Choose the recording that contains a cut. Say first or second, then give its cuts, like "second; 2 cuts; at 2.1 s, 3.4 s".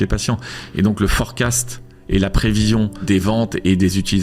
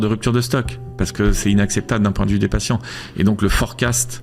first; 1 cut; at 3.0 s